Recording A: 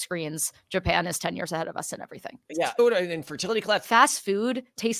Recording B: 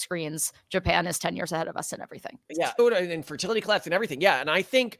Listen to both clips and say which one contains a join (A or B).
A